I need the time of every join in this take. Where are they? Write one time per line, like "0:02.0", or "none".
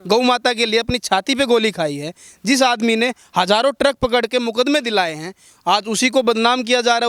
none

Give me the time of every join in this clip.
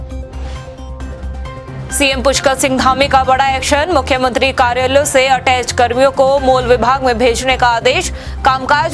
0:01.7

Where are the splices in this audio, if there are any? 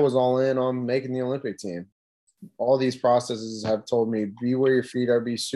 0:02.0

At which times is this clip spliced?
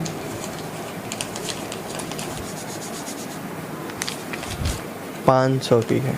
0:02.3
0:04.7

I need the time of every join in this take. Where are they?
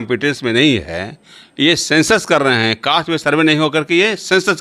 none

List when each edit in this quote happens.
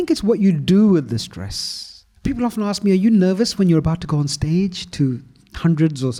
none

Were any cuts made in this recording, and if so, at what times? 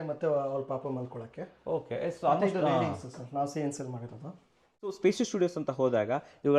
0:04.9

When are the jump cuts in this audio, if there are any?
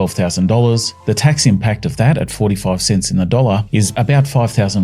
0:03.9

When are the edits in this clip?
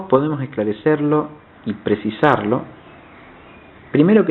none

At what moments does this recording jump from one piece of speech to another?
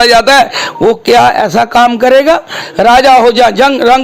0:02.6

